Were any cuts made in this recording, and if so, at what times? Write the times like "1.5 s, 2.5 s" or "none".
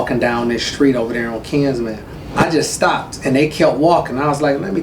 2.3 s